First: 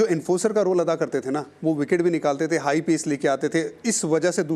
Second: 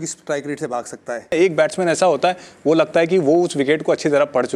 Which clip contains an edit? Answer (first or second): second